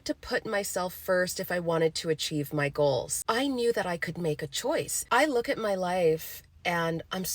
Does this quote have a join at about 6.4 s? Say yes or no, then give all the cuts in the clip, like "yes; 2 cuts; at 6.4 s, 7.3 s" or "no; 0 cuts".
no; 2 cuts; at 3.2 s, 4.9 s